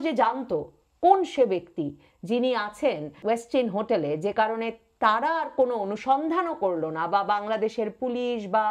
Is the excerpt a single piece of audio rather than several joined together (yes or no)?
no